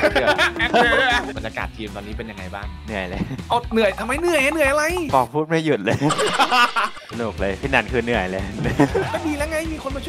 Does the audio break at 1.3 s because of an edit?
yes; 2 cuts; at 1.3 s, 7.1 s

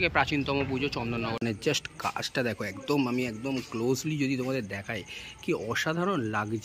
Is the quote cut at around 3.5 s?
no; 1 cut; at 1.4 s

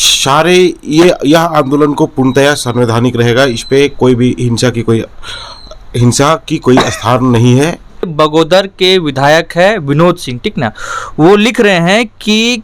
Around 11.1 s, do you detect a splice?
no; 1 cut; at 8.1 s

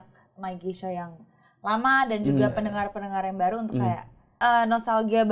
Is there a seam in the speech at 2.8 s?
no; 1 cut; at 4.4 s

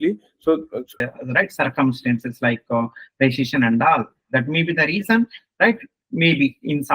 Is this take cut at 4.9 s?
no; 1 cut; at 1.0 s

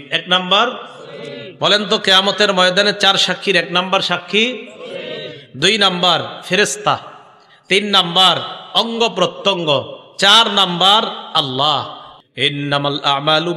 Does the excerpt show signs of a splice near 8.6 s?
no; 1 cut; at 12.0 s

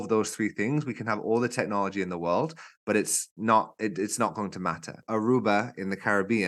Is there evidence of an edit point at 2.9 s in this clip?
no; 1 cut; at 5.0 s

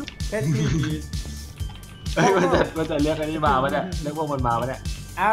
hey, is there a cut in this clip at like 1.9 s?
no; 0 cuts

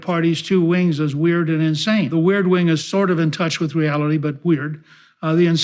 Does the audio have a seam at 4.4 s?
no; 1 cut; at 2.1 s

